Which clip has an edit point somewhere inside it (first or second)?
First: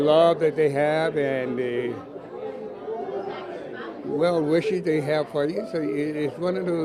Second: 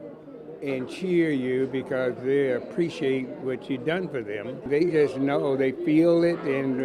second